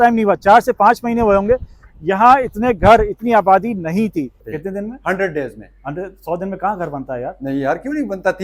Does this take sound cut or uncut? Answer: cut